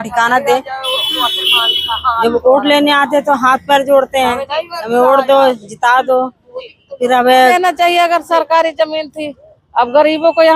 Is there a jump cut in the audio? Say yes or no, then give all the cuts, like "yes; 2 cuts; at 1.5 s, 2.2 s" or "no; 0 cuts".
yes; 1 cut; at 7.5 s